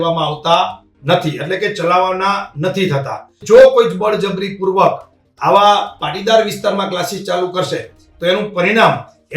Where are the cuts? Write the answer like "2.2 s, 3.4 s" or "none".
3.4 s